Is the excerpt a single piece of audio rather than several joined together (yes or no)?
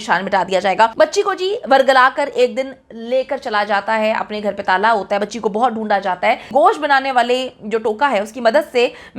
no